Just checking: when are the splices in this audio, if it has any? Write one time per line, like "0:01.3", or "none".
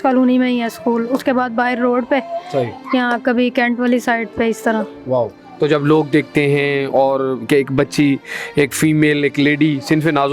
none

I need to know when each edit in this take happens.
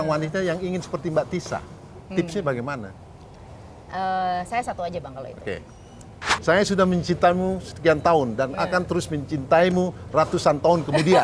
0:06.3

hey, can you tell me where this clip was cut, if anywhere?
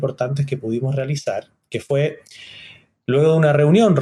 none

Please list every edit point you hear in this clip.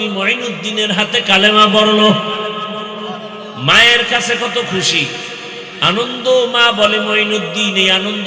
none

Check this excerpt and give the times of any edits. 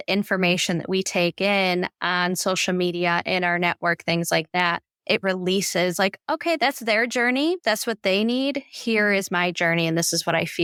none

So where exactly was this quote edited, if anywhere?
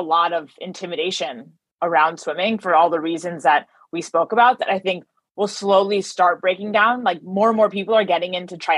none

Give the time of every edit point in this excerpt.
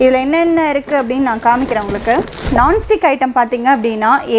0:02.5

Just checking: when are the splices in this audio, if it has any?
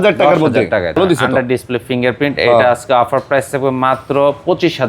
0:01.0

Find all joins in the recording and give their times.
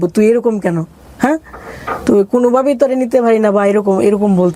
none

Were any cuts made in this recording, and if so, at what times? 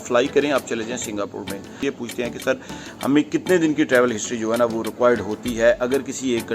0:01.8

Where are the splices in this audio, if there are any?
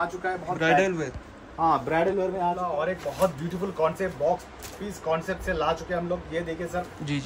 0:02.6

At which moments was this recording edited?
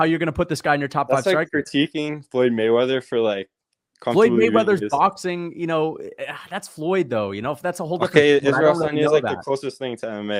none

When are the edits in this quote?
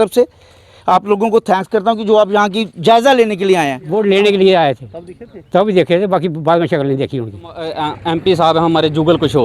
0:03.8
0:07.8

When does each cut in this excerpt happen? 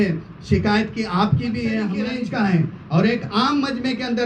0:02.1

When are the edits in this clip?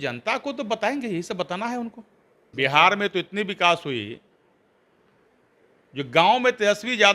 0:02.4

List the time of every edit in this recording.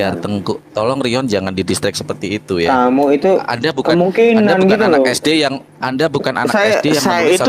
none

